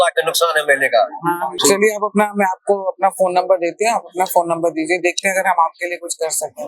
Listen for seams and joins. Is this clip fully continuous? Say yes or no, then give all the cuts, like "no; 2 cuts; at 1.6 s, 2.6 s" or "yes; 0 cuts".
no; 1 cut; at 1.6 s